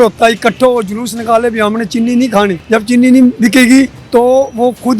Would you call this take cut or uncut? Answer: cut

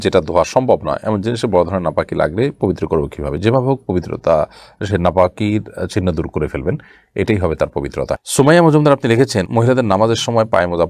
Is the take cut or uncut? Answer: uncut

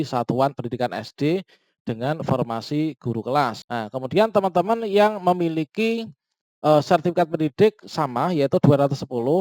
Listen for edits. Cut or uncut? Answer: cut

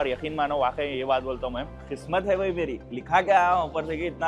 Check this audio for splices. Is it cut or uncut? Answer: cut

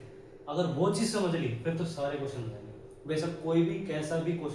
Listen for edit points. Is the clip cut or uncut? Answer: uncut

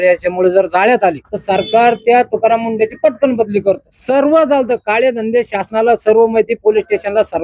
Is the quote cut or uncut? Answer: cut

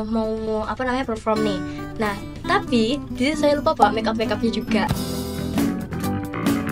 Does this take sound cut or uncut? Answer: uncut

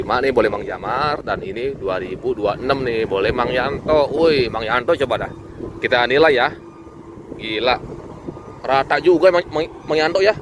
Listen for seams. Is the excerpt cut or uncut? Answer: uncut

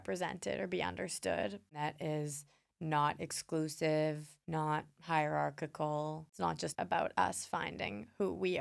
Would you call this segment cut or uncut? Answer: cut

